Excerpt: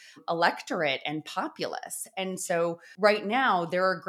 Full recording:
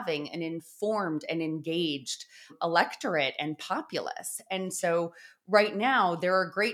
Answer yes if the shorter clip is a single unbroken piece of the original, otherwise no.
no